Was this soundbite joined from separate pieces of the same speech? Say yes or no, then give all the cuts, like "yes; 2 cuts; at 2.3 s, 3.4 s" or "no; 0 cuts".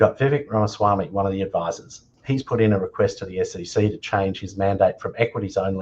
yes; 1 cut; at 2.1 s